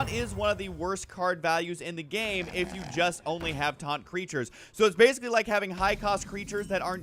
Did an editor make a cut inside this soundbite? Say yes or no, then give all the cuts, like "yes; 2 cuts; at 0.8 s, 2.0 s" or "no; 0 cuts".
no; 0 cuts